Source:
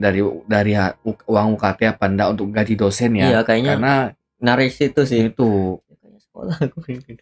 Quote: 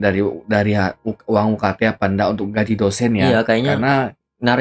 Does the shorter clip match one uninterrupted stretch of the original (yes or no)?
yes